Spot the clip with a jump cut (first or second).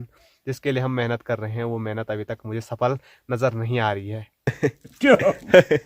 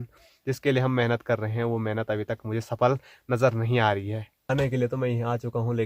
first